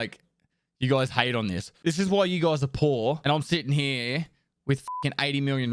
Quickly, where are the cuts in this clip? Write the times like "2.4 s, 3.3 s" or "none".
1.7 s, 3.2 s